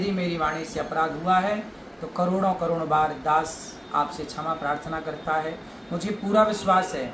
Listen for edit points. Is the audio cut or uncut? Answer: uncut